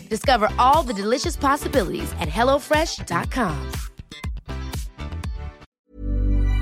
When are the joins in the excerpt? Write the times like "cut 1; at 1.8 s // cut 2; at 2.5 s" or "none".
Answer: cut 1; at 5.7 s